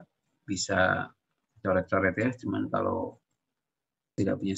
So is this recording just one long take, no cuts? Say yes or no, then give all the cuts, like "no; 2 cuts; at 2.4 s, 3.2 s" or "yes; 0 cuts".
yes; 0 cuts